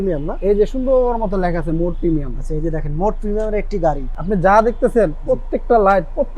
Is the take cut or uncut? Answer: cut